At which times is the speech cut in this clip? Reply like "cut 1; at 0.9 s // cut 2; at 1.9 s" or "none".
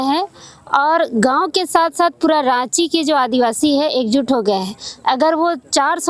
none